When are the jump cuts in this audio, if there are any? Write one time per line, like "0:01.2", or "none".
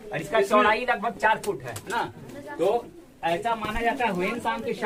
none